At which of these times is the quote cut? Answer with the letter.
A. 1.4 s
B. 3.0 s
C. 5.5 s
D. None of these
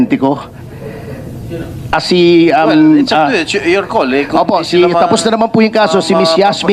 D